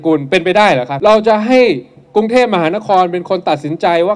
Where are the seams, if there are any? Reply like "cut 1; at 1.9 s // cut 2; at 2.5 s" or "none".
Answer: cut 1; at 0.9 s